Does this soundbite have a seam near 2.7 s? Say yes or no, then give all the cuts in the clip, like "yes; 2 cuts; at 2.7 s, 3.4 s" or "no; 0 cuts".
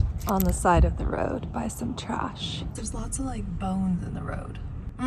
yes; 1 cut; at 2.7 s